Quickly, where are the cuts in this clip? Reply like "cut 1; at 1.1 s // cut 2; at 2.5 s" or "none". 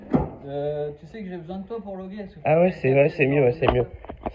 none